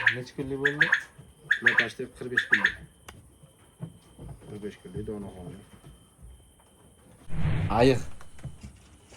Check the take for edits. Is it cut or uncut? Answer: cut